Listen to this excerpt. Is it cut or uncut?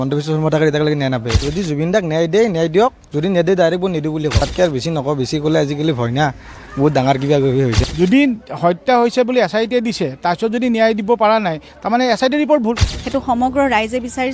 cut